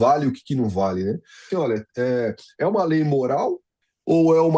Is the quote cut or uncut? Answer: cut